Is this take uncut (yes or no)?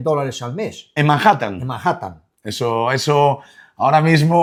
yes